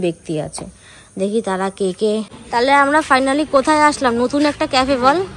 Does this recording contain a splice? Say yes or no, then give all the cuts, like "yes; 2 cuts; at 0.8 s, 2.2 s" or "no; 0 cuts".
yes; 1 cut; at 2.4 s